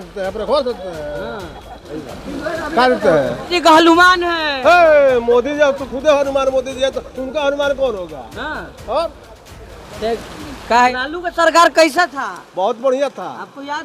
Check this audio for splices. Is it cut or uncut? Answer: cut